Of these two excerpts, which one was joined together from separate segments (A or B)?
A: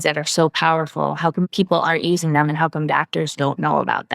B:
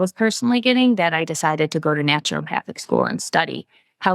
A